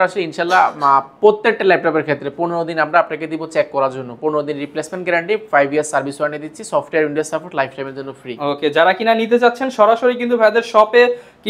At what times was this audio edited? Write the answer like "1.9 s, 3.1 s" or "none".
none